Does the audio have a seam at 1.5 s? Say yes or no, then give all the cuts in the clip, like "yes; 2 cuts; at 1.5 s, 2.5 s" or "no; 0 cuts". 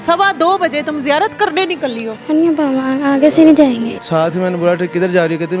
no; 1 cut; at 4.0 s